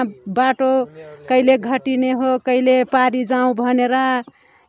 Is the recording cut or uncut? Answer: uncut